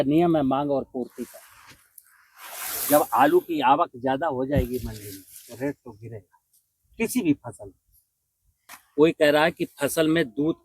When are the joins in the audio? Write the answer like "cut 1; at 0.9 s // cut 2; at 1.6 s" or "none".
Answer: cut 1; at 8.6 s